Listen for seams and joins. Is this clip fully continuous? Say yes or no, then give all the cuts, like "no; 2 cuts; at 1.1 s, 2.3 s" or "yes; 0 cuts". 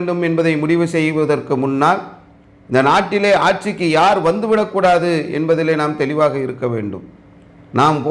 yes; 0 cuts